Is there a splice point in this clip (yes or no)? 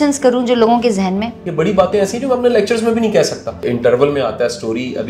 yes